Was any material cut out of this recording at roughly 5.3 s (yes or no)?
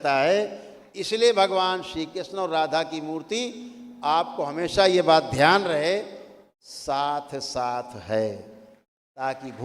no